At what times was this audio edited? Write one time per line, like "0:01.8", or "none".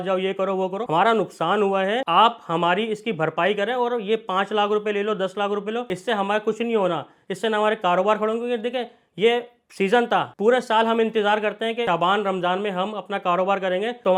none